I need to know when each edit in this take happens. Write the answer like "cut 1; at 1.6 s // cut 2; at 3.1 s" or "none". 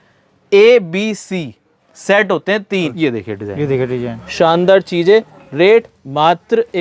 cut 1; at 2.9 s